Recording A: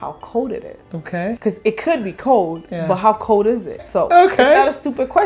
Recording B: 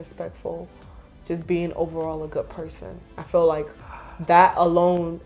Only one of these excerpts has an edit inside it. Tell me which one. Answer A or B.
A